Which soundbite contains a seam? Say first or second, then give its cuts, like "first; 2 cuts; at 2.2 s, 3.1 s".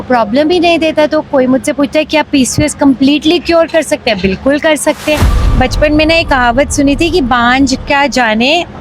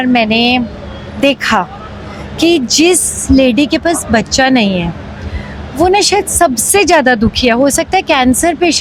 first; 1 cut; at 5.4 s